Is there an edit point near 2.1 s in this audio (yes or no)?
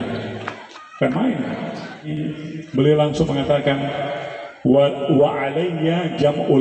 yes